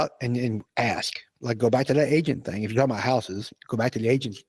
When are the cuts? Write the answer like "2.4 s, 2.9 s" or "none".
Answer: 1.3 s